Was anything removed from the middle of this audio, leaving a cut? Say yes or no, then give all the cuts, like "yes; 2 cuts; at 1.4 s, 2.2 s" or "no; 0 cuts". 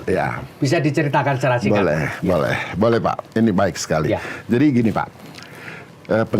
no; 0 cuts